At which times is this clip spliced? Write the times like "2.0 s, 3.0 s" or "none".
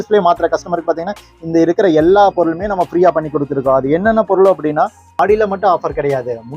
5.2 s